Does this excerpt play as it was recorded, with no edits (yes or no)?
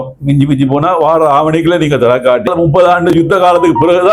no